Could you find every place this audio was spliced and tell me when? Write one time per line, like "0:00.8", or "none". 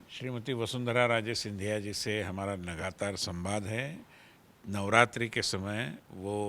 none

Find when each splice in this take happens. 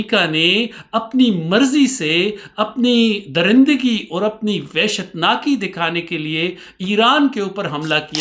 none

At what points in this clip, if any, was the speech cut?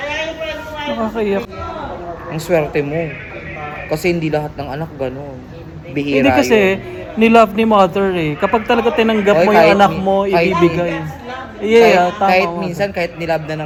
none

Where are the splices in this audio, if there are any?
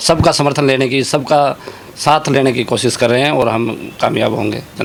none

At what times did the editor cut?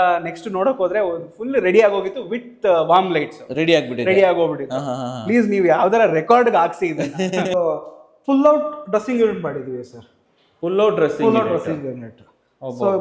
0:07.5

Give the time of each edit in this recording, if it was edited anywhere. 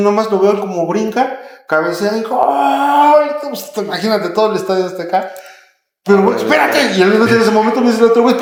none

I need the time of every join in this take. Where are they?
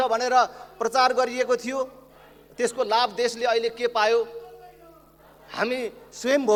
none

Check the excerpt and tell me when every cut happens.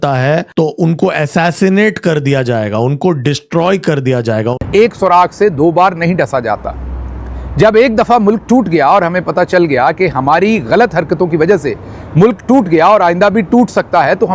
0:04.6

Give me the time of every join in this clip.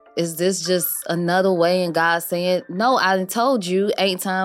none

